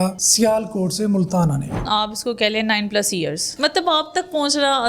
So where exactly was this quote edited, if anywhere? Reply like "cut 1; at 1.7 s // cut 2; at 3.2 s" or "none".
cut 1; at 1.8 s // cut 2; at 3.6 s